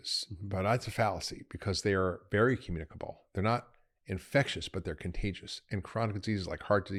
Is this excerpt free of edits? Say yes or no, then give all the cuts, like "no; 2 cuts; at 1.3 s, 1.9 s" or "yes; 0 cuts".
yes; 0 cuts